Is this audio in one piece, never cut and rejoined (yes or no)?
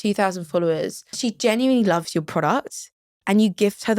no